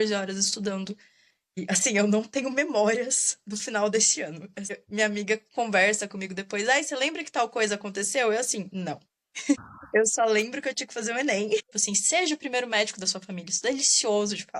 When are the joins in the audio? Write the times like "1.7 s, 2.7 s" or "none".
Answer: 11.8 s